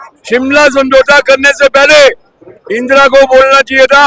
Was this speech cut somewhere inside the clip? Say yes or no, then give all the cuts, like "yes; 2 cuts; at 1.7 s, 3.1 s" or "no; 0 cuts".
no; 0 cuts